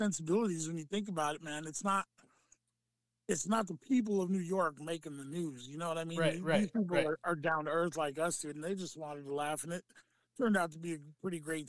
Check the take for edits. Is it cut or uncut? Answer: uncut